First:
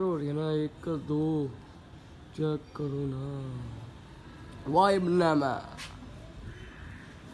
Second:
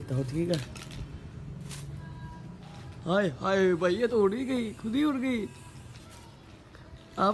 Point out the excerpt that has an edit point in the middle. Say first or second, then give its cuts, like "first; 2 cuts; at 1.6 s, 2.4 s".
second; 1 cut; at 6.0 s